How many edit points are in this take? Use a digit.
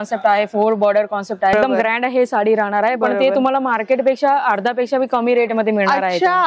1